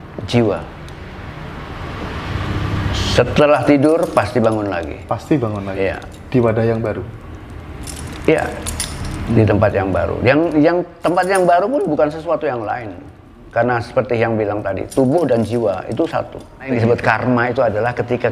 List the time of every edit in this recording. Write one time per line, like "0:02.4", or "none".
0:16.7